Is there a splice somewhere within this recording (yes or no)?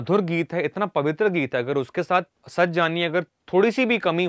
yes